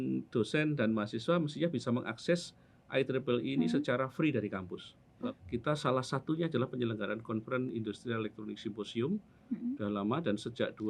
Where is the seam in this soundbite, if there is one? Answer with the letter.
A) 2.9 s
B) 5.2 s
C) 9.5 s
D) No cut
B